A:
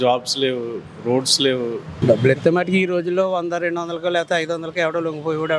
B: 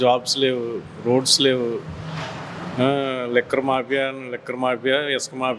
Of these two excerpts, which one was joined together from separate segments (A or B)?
A